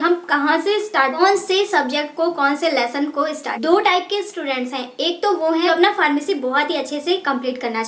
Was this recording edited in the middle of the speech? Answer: yes; 3 cuts; at 1.2 s, 3.5 s, 5.7 s

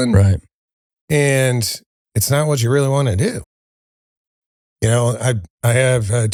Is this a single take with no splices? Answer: yes; 0 cuts

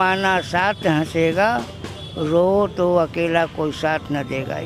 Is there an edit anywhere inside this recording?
no; 0 cuts

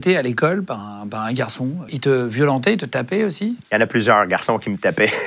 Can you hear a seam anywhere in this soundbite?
yes; 2 cuts; at 1.9 s, 3.6 s

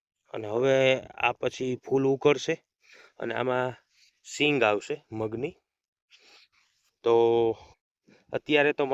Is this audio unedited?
yes; 0 cuts

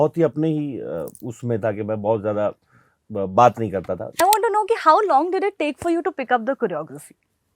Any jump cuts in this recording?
yes; 1 cut; at 4.2 s

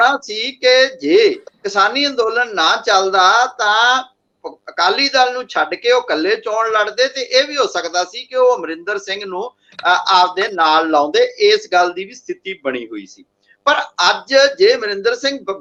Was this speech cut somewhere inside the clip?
no; 0 cuts

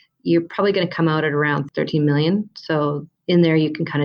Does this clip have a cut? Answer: yes; 1 cut; at 3.1 s

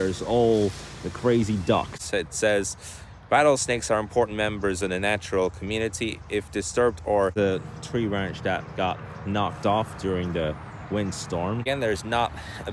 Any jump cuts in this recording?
yes; 3 cuts; at 2.0 s, 7.3 s, 11.6 s

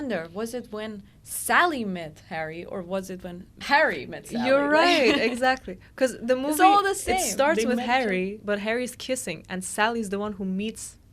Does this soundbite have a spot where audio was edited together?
yes; 2 cuts; at 3.6 s, 8.4 s

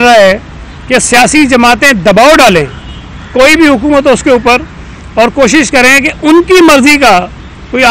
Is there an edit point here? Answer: no; 0 cuts

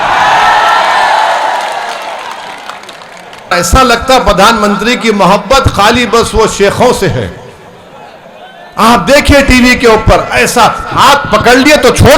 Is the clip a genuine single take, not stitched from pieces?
no; 1 cut; at 3.5 s

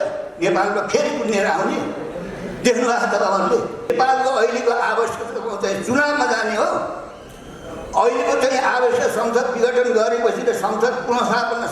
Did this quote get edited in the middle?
yes; 1 cut; at 3.9 s

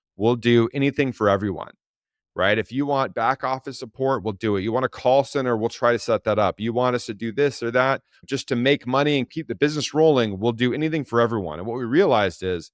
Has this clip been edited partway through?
yes; 2 cuts; at 8.2 s, 9.4 s

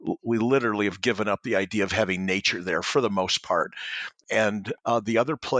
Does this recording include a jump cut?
yes; 1 cut; at 4.3 s

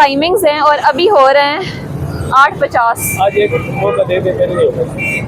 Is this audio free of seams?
yes; 0 cuts

